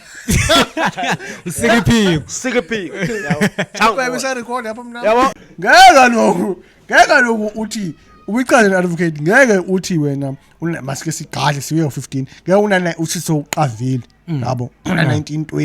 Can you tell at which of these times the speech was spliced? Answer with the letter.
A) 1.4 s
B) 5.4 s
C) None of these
B